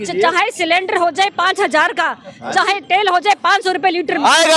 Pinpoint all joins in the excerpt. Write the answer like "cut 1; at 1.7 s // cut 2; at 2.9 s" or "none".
none